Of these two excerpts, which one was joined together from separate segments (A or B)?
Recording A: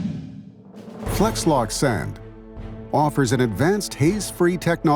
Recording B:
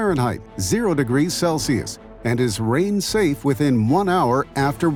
A